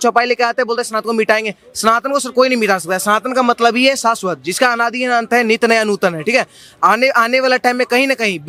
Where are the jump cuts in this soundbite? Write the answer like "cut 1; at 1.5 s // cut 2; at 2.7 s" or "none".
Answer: none